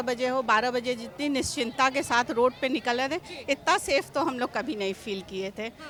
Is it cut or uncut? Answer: uncut